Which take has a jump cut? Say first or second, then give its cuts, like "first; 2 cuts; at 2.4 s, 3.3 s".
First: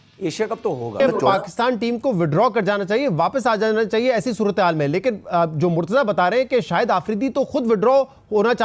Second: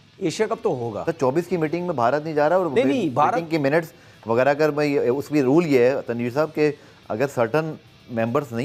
first; 1 cut; at 1.0 s